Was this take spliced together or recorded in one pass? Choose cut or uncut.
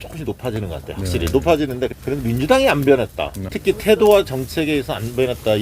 cut